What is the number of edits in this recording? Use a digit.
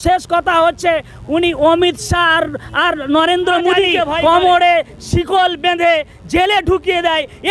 1